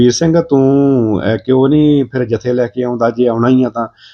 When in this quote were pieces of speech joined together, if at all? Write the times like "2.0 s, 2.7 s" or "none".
none